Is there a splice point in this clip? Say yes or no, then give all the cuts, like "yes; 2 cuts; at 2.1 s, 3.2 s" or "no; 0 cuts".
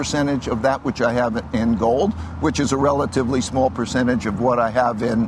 no; 0 cuts